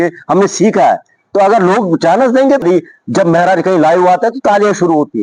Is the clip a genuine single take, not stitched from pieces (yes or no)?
no